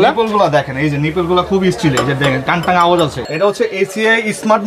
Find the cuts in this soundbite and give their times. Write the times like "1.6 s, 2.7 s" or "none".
3.2 s

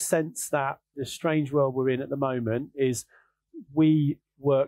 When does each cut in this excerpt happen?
1.0 s

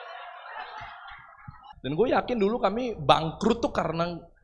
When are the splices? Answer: 1.7 s

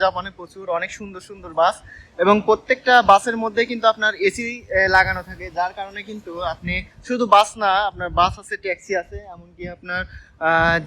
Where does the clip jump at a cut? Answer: none

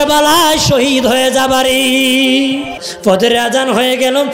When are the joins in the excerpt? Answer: 2.9 s

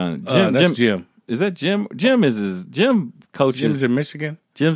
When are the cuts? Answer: none

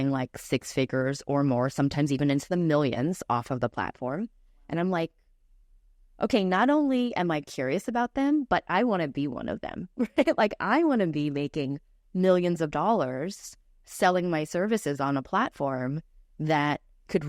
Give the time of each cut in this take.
none

